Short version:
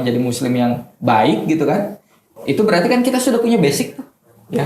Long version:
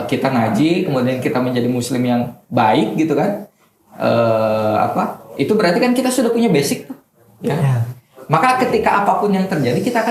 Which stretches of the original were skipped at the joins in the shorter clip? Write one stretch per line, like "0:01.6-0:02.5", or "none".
0:03.8-0:05.2